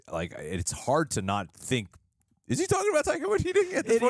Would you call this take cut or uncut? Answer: uncut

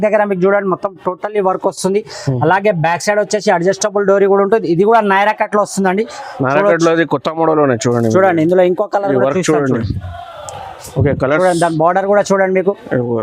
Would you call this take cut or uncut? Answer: uncut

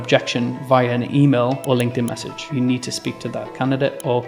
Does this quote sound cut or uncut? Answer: cut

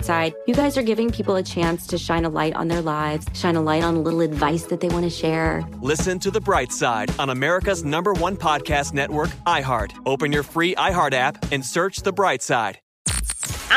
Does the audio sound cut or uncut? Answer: cut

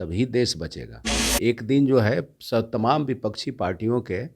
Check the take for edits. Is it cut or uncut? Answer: cut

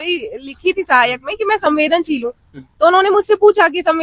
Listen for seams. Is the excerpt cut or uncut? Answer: uncut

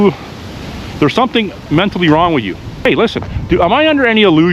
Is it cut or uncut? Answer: cut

